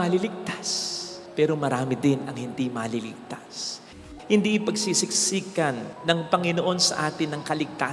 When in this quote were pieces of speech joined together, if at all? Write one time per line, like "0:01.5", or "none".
0:04.0